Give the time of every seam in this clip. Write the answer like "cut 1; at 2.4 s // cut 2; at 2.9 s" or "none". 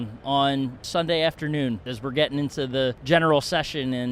cut 1; at 0.8 s // cut 2; at 1.9 s // cut 3; at 3.0 s